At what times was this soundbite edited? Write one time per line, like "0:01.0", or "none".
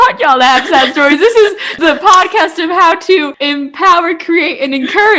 0:01.7
0:03.4